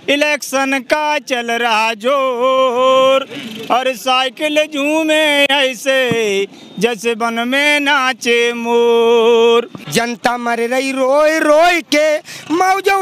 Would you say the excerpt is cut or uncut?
cut